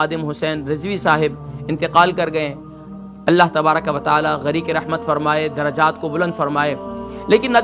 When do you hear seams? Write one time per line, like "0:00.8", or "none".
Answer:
none